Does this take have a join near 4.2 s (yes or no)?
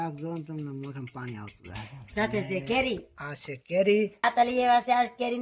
yes